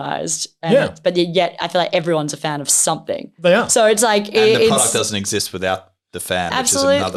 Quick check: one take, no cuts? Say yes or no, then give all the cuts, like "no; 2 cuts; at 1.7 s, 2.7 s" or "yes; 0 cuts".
yes; 0 cuts